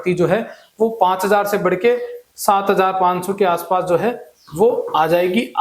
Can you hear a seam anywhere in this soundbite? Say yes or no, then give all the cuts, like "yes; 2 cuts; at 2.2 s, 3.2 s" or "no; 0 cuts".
no; 0 cuts